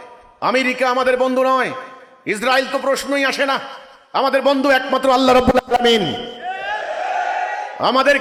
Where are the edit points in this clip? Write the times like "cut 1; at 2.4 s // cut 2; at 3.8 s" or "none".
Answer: none